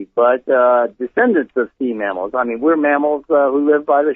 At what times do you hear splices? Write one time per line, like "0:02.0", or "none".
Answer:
0:02.8